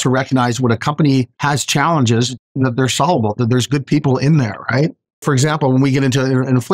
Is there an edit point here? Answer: yes; 1 cut; at 5.2 s

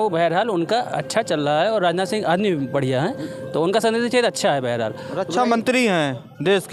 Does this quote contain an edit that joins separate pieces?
no; 0 cuts

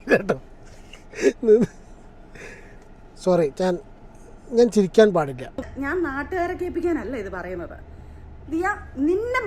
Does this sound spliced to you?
yes; 1 cut; at 5.6 s

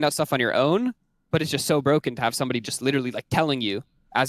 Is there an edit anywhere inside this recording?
no; 0 cuts

